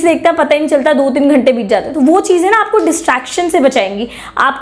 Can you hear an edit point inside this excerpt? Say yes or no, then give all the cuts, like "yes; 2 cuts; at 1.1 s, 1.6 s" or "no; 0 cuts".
no; 0 cuts